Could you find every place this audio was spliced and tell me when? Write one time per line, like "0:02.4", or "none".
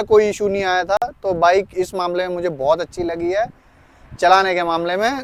none